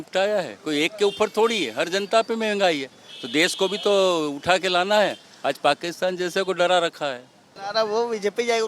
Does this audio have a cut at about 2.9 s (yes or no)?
no